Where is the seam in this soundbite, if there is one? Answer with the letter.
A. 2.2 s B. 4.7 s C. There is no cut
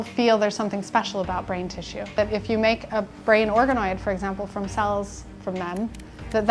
A